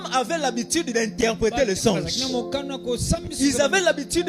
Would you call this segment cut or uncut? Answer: uncut